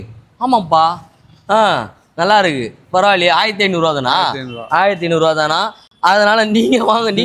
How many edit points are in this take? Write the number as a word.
zero